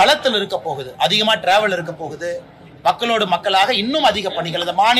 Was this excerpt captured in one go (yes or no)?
yes